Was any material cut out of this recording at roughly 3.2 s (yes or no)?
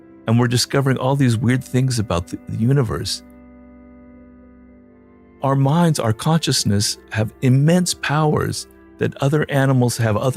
no